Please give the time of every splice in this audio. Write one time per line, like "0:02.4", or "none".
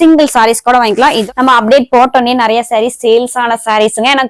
0:01.2